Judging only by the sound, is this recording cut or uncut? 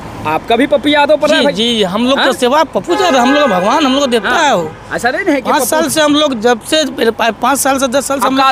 uncut